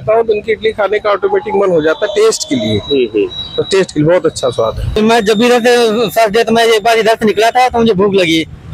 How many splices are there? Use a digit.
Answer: 1